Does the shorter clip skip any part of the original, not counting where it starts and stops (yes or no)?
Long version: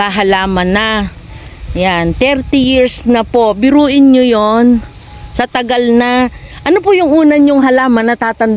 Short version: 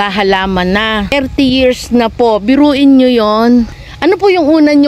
yes